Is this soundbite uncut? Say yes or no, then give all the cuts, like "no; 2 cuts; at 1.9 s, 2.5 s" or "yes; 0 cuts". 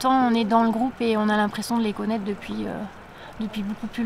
yes; 0 cuts